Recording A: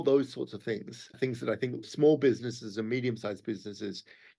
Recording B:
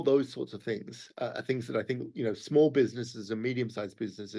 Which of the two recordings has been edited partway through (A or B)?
A